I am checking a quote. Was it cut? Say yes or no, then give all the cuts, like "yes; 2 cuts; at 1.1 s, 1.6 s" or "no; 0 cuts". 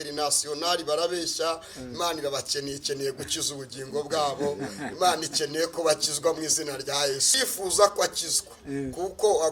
yes; 1 cut; at 7.3 s